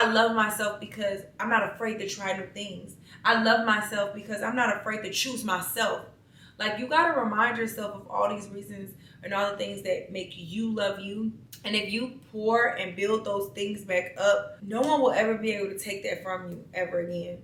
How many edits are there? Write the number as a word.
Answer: zero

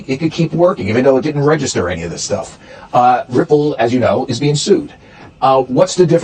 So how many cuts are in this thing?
zero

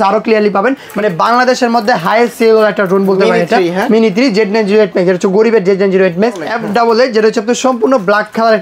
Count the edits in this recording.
two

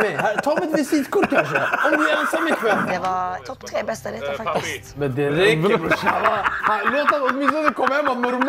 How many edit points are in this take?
two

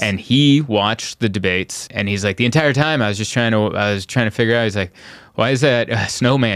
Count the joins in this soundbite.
one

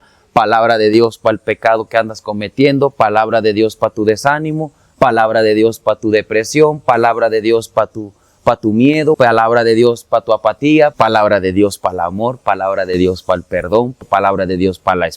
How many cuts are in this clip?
three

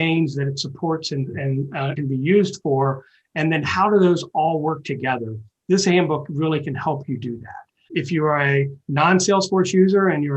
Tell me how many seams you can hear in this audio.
two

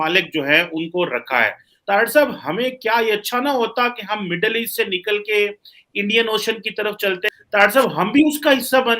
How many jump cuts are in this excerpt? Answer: two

